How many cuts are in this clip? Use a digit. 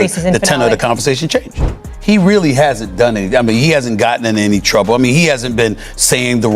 1